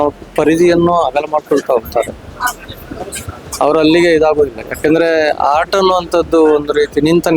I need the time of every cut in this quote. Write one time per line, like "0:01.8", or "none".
none

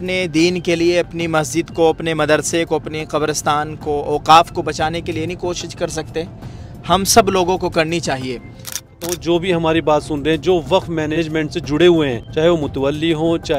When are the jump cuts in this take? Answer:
0:09.0
0:11.1
0:12.2

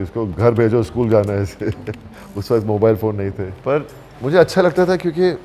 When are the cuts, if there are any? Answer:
0:03.5

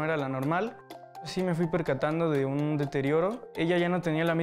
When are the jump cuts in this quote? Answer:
0:01.3
0:03.5

